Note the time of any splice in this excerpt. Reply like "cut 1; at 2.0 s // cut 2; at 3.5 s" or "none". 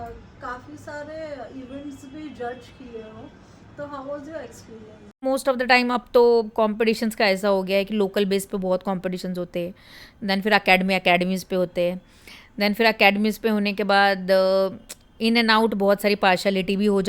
cut 1; at 5.2 s